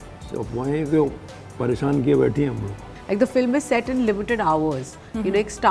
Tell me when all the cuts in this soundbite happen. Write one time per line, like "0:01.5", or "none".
0:02.7